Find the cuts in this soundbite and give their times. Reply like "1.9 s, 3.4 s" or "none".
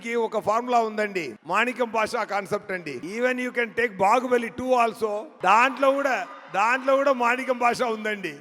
1.4 s, 3.0 s, 5.3 s